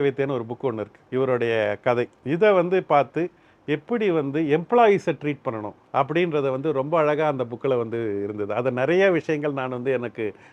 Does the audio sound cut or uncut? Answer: cut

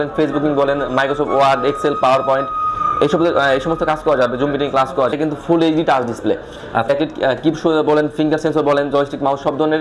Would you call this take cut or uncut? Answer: cut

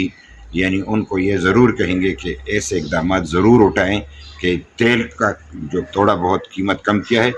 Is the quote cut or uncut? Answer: cut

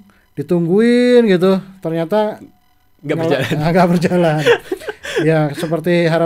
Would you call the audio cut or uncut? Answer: uncut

